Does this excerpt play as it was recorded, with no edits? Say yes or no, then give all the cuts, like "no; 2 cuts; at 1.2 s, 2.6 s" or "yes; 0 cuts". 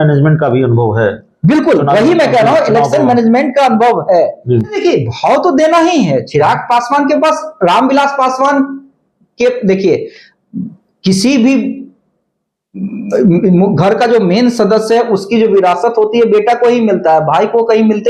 no; 1 cut; at 4.8 s